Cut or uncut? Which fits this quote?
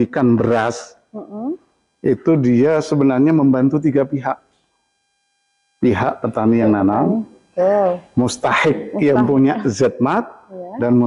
uncut